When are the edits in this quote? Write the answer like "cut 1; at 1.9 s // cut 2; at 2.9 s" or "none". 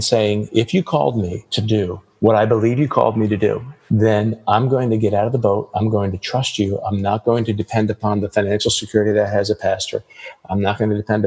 cut 1; at 1.6 s // cut 2; at 3.7 s